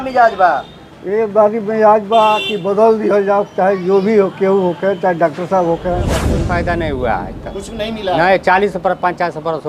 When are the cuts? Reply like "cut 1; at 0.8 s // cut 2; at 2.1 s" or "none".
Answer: cut 1; at 6.3 s